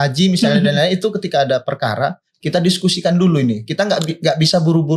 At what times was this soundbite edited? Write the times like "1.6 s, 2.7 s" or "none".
none